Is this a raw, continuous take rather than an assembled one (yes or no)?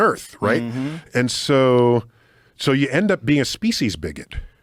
yes